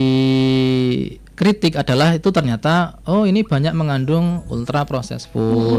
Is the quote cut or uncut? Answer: uncut